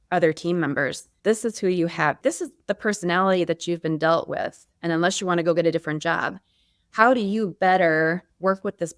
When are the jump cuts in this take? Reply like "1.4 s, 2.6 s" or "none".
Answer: 1.0 s, 2.2 s

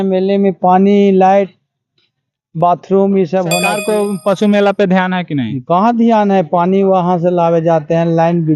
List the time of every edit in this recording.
3.7 s

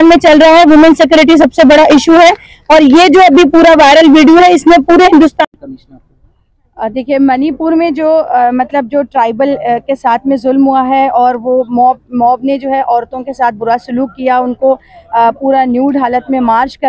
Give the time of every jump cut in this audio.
5.4 s

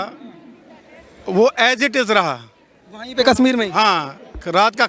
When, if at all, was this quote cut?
none

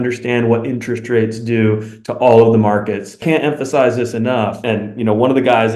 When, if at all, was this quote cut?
3.2 s, 4.6 s

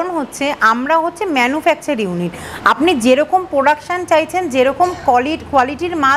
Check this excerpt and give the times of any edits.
none

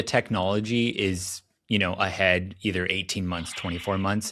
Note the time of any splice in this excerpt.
none

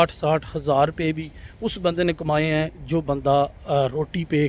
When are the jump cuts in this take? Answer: none

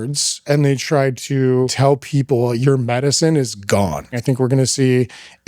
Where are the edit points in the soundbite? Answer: 1.7 s, 4.1 s

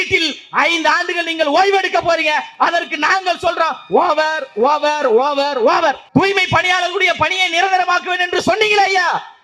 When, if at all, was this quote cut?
6.0 s

